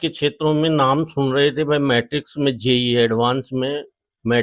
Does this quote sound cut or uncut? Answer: uncut